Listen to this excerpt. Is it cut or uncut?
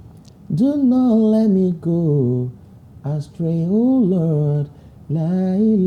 uncut